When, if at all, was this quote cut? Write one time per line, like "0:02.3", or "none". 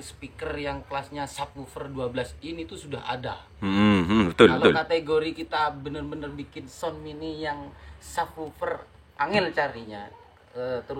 none